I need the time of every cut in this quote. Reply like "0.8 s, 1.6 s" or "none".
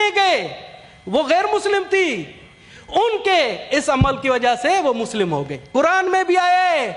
5.6 s